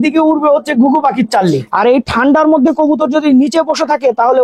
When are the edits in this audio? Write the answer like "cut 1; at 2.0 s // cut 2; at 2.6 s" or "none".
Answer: cut 1; at 1.6 s